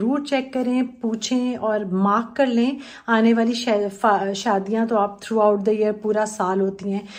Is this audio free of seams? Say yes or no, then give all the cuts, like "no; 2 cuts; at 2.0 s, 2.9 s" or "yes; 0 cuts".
yes; 0 cuts